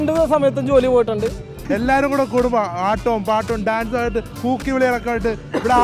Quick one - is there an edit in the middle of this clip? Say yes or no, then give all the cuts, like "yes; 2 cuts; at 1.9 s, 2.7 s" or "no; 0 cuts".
yes; 1 cut; at 1.5 s